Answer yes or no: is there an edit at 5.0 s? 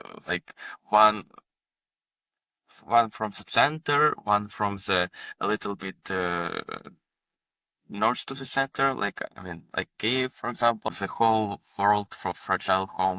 no